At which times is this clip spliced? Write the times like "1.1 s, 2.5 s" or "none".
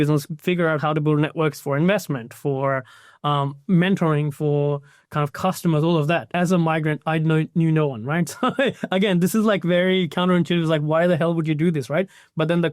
6.3 s